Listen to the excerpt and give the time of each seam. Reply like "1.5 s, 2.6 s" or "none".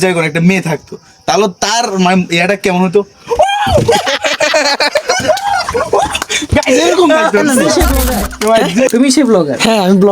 8.9 s